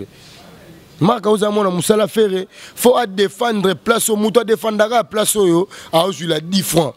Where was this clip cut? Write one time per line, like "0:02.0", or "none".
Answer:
none